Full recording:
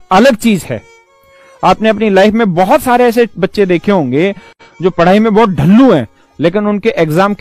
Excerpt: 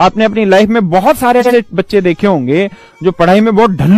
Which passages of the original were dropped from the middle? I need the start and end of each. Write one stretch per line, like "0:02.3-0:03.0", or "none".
0:04.5-0:04.6